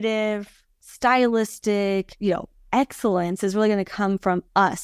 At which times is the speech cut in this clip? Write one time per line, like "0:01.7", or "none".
none